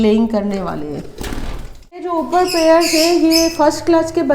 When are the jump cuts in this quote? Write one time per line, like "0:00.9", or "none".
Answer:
0:02.1